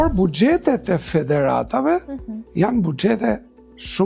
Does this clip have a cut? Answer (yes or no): no